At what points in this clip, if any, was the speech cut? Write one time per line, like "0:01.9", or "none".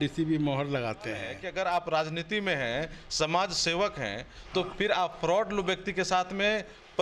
0:01.4

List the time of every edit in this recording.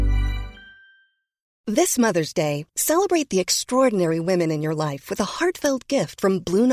0:01.5

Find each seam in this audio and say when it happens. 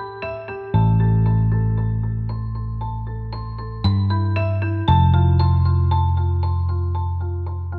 0:03.9

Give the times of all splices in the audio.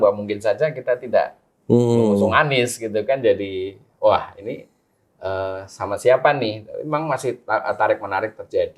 none

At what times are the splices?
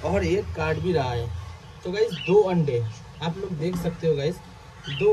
none

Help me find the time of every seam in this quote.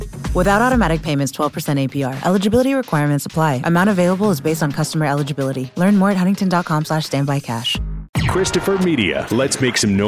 0:08.0

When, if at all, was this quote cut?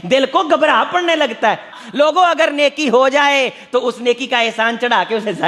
0:01.8

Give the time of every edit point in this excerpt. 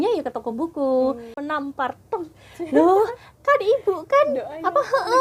0:01.4

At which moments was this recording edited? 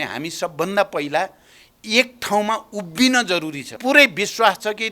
0:03.7

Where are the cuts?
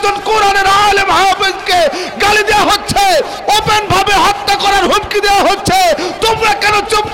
none

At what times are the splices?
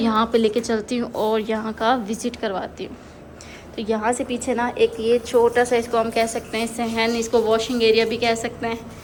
none

